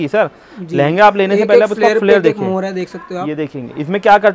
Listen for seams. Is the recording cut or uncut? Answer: uncut